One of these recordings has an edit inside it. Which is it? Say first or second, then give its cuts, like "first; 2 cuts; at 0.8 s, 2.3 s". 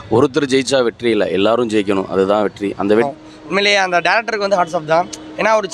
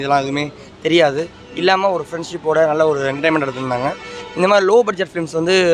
first; 1 cut; at 3.1 s